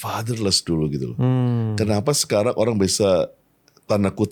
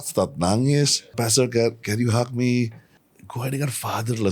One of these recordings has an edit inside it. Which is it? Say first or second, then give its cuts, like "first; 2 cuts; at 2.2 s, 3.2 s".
second; 2 cuts; at 1.1 s, 2.8 s